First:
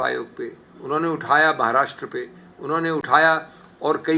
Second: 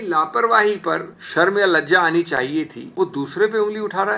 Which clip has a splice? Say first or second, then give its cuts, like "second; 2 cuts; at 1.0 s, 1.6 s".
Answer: second; 2 cuts; at 1.2 s, 2.8 s